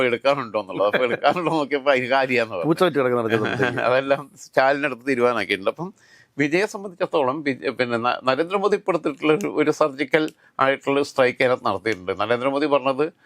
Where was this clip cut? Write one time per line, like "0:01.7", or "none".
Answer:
none

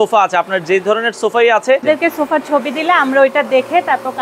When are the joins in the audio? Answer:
0:01.8

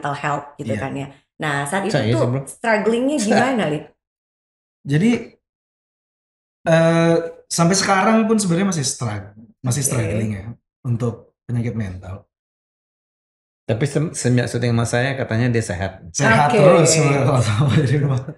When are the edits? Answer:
none

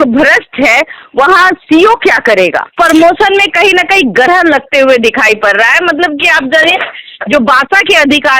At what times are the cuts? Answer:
0:02.7

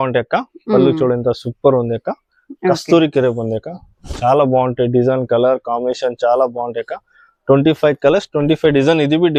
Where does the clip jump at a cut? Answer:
none

